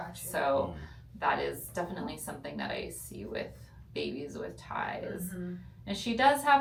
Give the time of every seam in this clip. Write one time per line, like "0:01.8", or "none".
none